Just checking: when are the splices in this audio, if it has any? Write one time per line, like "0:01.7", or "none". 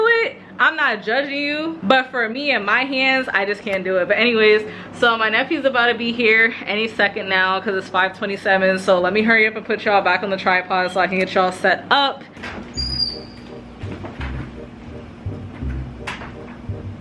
none